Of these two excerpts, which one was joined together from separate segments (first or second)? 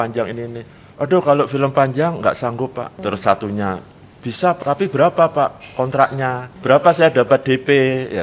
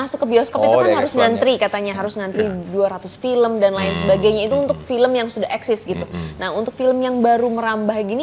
first